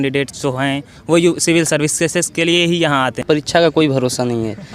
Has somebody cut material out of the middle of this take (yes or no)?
yes